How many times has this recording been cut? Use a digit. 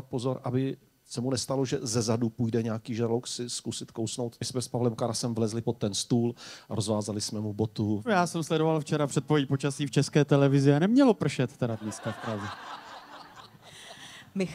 2